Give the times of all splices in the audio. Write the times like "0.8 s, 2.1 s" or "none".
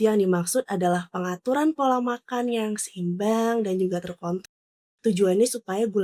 4.5 s